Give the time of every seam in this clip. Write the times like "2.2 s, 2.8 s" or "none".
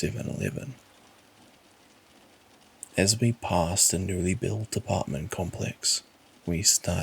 1.5 s, 2.9 s